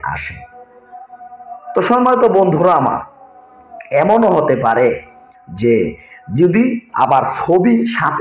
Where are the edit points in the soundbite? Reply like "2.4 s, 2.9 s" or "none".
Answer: none